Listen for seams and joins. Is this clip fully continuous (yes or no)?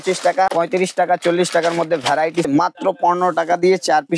no